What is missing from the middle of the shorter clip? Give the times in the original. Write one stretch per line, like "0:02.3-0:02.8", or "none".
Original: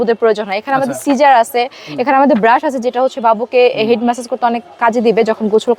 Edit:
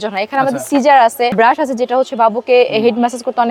0:01.7-0:02.4